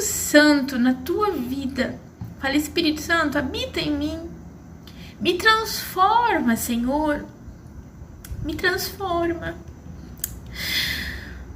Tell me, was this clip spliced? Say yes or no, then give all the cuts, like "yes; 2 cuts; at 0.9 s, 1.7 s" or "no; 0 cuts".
no; 0 cuts